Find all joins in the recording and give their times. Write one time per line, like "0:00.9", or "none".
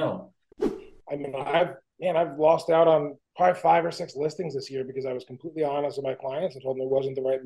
0:00.9
0:01.8
0:03.2